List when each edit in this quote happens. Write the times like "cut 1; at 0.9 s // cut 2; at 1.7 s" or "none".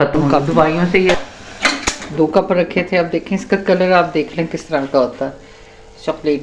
cut 1; at 1.2 s